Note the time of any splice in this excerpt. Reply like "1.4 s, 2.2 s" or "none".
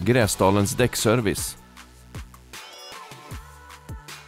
1.4 s